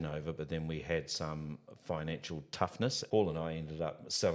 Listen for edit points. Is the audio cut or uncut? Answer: cut